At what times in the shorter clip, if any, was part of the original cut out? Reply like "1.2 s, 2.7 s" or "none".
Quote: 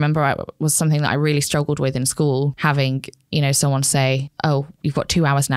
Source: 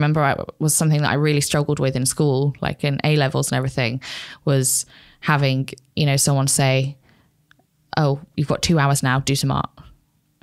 2.5 s, 4.3 s